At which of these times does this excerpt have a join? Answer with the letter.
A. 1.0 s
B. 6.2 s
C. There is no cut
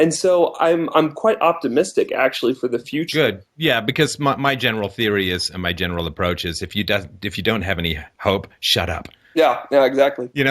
B